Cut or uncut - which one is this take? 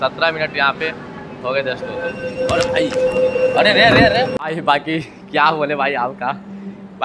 uncut